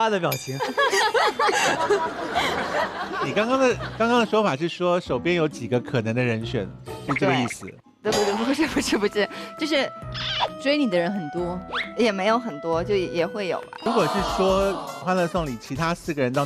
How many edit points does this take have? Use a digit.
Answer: 1